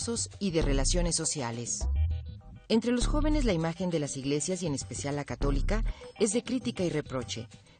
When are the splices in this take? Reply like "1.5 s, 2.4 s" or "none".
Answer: none